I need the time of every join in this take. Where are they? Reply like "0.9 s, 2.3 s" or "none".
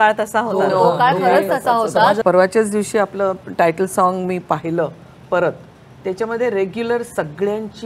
2.2 s